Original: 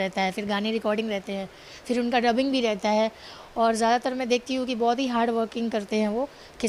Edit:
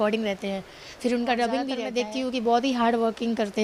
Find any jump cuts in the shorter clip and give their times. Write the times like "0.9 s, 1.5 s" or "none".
1.8 s